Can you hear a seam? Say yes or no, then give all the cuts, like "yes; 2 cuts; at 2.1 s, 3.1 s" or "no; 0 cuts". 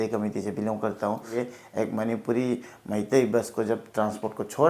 yes; 1 cut; at 1.3 s